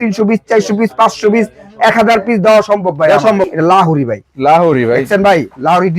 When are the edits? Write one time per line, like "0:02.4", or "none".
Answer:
0:03.5